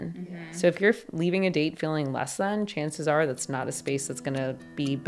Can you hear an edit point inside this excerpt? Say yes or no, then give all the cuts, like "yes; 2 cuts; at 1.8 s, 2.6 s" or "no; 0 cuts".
no; 0 cuts